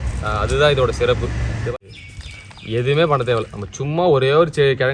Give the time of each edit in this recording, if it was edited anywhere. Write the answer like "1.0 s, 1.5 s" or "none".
1.7 s